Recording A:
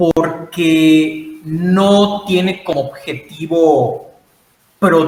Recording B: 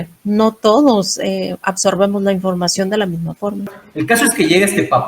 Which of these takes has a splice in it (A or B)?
B